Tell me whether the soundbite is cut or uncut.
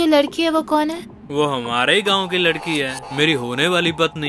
uncut